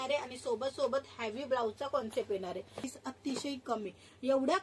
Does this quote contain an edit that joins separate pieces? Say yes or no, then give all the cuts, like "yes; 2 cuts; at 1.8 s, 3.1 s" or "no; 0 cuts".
yes; 1 cut; at 2.9 s